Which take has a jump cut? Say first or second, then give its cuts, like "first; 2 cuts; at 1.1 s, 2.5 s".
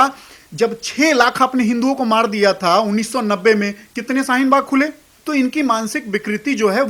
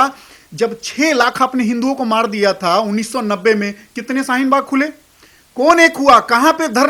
first; 1 cut; at 5.1 s